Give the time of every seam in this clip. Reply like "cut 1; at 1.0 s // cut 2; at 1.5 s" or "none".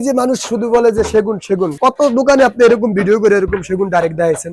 none